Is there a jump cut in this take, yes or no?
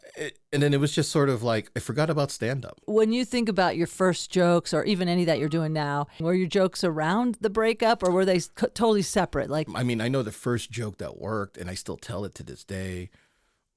yes